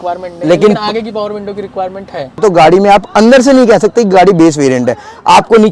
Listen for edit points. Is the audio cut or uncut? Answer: cut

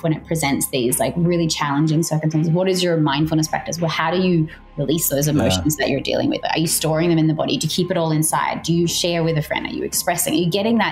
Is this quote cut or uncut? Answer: uncut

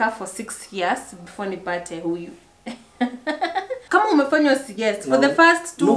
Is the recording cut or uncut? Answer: cut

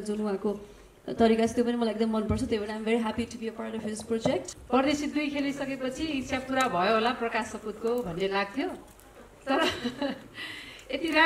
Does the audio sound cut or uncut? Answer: cut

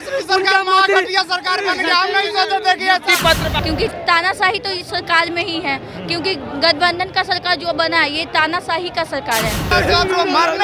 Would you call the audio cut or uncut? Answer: cut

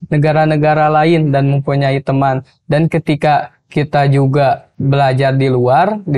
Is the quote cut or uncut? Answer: cut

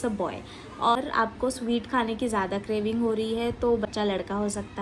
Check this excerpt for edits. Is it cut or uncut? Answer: cut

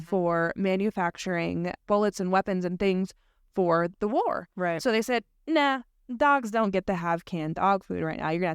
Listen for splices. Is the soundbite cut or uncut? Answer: cut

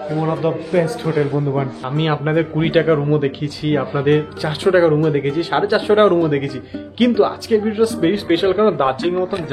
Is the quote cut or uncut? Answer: cut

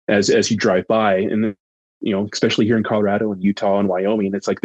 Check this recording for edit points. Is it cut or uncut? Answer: uncut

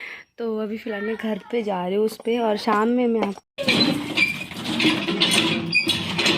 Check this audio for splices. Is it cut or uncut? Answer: cut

